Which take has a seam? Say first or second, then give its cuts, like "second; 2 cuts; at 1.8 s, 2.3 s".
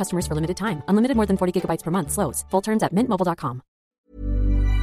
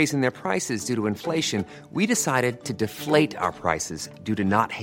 first; 1 cut; at 3.8 s